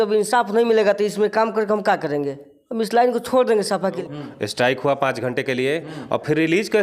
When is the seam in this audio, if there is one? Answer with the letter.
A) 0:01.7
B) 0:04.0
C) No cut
B